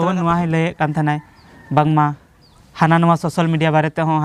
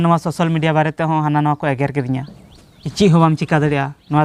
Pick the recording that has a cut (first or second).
second